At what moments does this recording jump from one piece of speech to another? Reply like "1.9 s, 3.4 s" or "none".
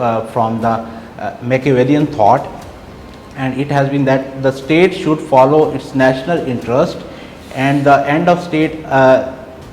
none